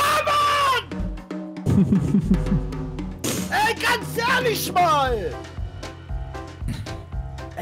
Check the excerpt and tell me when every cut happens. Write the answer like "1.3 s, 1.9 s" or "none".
none

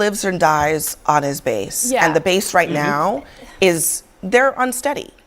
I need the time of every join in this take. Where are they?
none

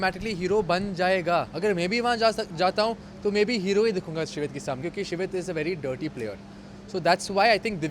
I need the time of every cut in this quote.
1.5 s, 4.8 s

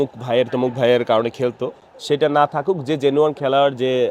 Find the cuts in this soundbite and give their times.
none

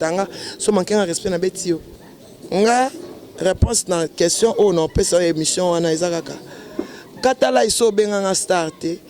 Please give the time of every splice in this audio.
1.9 s

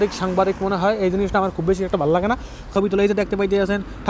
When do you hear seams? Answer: 2.7 s

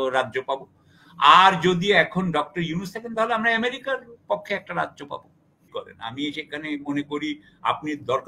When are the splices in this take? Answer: 5.7 s

